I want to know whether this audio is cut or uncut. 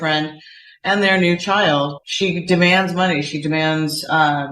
cut